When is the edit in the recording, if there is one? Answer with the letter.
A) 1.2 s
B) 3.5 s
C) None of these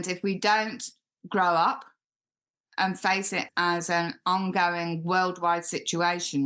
B